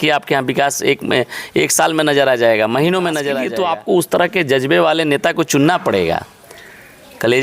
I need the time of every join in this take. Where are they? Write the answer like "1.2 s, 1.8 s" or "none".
3.4 s